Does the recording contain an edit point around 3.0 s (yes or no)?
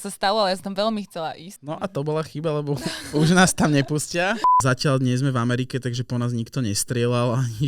no